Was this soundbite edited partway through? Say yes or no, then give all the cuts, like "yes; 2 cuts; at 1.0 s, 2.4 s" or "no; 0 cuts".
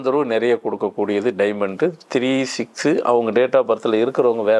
no; 0 cuts